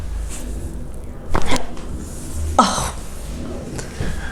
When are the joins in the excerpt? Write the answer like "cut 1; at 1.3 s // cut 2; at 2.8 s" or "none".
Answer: none